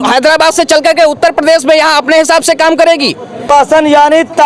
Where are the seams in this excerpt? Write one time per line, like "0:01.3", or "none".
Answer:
0:03.4

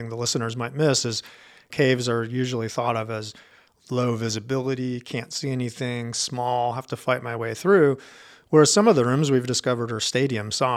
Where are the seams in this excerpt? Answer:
0:01.7

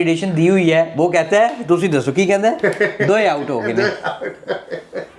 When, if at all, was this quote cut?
none

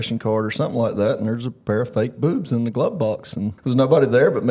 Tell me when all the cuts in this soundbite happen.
0:03.6

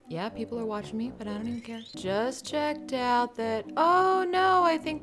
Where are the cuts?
0:02.0

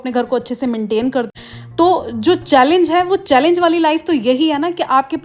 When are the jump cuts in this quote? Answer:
0:01.3

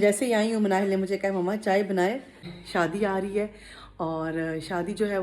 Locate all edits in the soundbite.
0:02.5

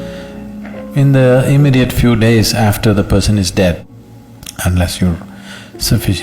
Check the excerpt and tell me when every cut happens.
0:03.8

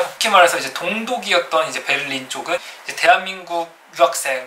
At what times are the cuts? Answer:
0:02.7

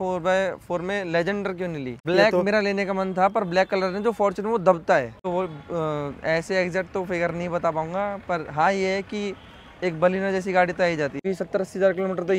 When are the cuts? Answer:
0:02.1
0:05.2
0:11.3

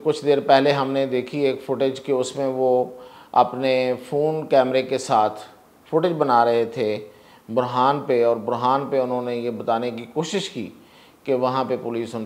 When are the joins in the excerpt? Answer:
none

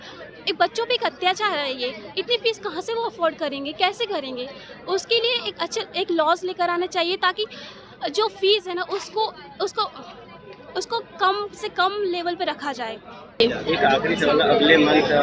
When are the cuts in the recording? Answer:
none

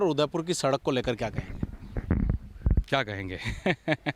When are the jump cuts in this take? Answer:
none

